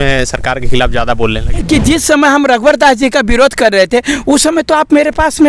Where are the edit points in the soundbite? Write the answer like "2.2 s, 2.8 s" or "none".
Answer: 1.5 s